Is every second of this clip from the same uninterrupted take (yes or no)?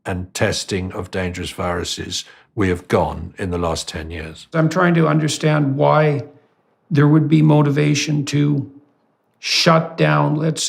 no